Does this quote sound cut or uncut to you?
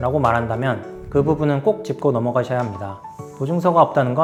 uncut